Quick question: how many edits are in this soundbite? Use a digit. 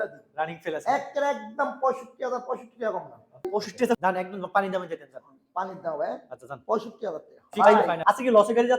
2